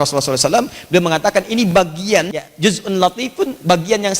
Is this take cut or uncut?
cut